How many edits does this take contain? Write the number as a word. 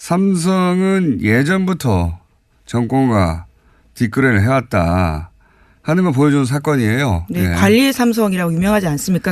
one